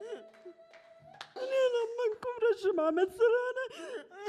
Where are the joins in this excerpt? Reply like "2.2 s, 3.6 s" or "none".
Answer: 1.4 s